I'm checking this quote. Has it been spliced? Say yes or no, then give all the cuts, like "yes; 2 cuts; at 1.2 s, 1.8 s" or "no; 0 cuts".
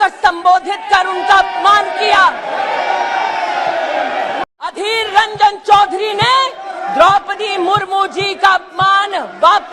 yes; 1 cut; at 4.7 s